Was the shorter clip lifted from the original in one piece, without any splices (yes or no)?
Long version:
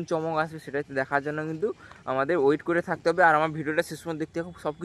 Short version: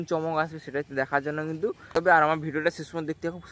no